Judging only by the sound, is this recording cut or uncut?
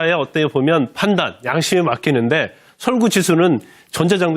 cut